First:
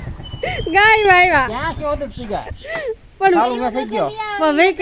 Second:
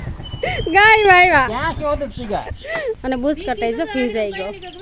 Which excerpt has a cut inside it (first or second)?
second